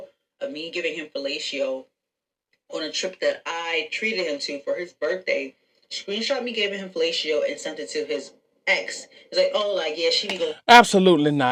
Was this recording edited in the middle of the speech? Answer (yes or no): no